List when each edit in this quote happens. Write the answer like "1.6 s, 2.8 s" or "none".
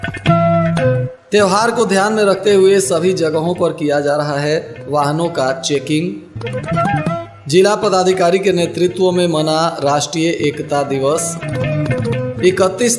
1.1 s